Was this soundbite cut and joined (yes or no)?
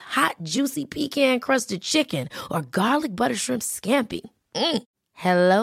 no